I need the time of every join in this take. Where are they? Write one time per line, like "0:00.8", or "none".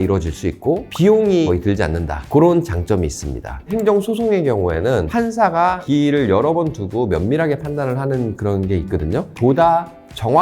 0:09.3